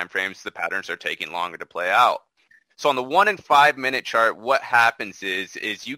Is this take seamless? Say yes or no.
yes